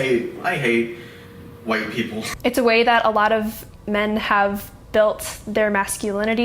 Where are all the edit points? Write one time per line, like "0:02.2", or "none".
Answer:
0:02.3